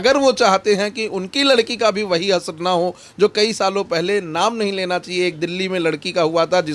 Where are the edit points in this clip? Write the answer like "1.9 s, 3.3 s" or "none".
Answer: none